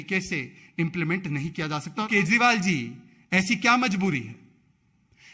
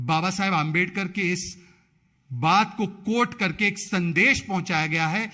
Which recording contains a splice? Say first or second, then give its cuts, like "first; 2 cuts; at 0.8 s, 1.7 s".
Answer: first; 1 cut; at 2.1 s